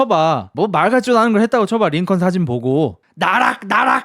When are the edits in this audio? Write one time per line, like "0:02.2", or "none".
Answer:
0:03.0